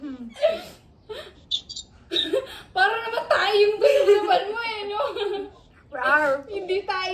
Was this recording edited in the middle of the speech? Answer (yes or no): no